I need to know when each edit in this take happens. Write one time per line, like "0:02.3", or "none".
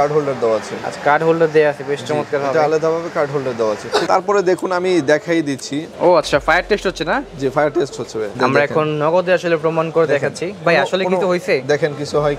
0:04.1
0:08.3